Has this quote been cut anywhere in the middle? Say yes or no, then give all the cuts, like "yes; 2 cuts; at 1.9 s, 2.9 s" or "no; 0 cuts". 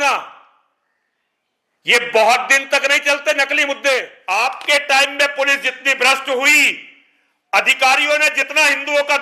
yes; 1 cut; at 4.2 s